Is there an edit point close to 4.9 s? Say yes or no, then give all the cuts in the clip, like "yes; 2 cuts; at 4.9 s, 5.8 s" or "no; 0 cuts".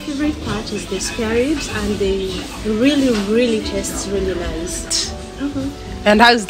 yes; 1 cut; at 4.9 s